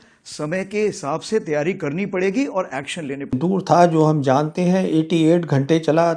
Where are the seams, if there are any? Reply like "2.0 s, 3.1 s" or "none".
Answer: 3.4 s